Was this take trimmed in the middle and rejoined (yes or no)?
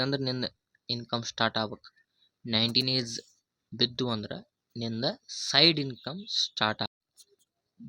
yes